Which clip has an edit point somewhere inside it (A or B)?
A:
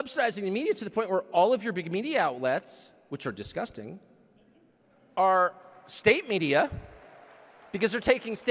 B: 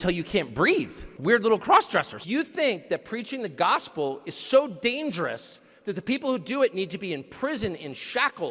B